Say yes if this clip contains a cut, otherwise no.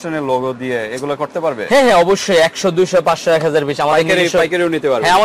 no